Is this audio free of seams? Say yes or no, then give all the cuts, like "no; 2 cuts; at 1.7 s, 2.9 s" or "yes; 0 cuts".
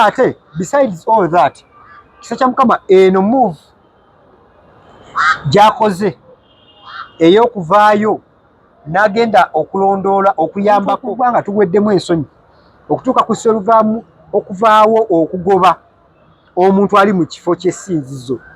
no; 1 cut; at 11.1 s